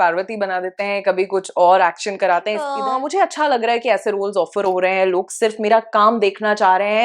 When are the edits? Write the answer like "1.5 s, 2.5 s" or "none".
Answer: 2.7 s